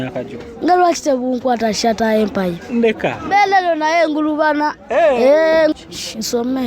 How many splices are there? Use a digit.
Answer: 1